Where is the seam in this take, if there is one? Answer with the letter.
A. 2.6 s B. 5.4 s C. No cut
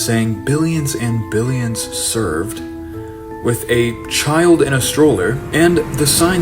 B